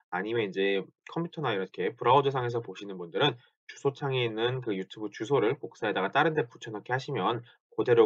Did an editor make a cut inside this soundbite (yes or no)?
yes